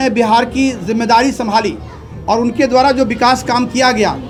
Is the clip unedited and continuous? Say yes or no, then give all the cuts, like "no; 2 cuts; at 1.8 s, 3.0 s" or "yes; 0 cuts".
yes; 0 cuts